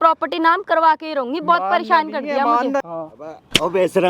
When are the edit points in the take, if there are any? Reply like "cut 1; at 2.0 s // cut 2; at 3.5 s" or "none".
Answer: cut 1; at 2.9 s

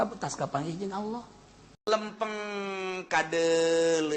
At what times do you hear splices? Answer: cut 1; at 1.9 s

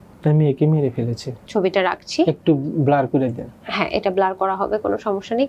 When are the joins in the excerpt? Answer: cut 1; at 1.5 s

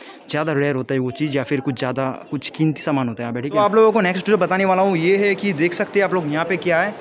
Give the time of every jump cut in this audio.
cut 1; at 3.6 s

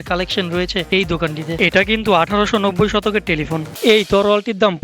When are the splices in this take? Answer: cut 1; at 1.5 s // cut 2; at 3.7 s

